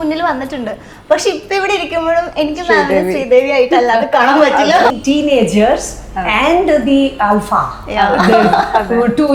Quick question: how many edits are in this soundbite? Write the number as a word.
one